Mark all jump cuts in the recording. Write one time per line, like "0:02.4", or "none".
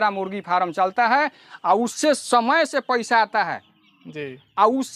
none